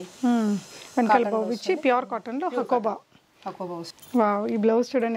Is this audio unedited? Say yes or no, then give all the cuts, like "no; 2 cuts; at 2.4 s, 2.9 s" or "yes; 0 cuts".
no; 1 cut; at 3.7 s